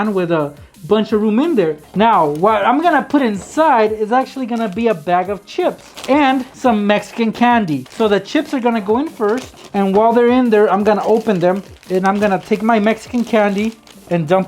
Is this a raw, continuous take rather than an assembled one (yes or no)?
no